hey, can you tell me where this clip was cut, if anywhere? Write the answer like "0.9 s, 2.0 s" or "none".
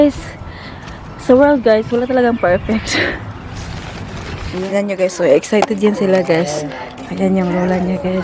4.5 s